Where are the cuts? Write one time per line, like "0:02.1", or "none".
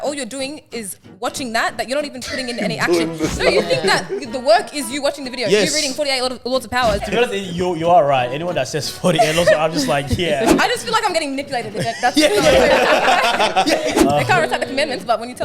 0:07.0
0:14.0